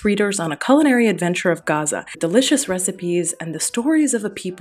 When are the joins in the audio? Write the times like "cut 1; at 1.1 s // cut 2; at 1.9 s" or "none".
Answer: cut 1; at 2.2 s